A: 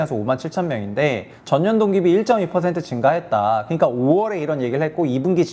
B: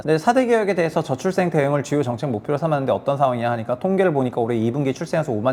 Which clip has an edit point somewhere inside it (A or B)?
A